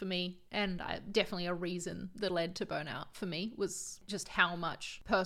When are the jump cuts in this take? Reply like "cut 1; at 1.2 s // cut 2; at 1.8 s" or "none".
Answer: none